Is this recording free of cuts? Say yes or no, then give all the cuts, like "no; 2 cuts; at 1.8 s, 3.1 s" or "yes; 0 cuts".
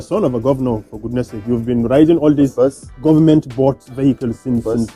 yes; 0 cuts